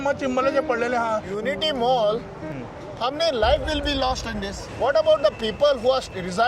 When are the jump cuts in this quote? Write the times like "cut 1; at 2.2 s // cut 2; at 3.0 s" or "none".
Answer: cut 1; at 1.3 s // cut 2; at 4.6 s